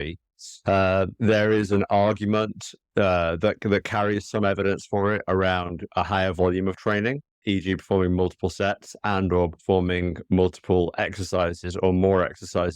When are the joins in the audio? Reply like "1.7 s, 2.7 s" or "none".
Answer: 7.4 s